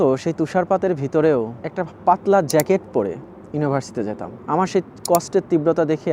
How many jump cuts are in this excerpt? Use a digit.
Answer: 2